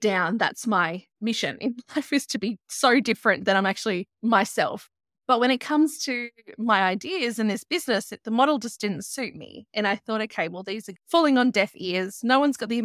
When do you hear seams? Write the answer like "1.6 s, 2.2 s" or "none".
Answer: 1.0 s, 4.1 s, 4.9 s, 10.9 s